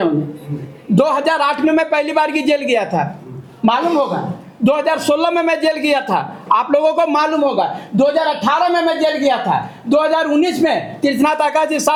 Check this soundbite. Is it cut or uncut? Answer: uncut